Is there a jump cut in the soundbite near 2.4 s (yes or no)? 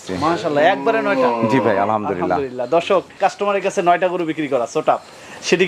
no